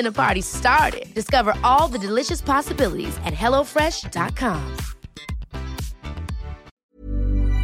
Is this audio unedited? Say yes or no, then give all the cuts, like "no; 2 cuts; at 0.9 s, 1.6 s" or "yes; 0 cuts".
no; 1 cut; at 6.7 s